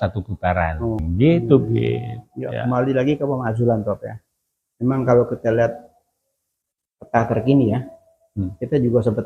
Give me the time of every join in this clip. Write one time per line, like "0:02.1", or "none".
0:01.0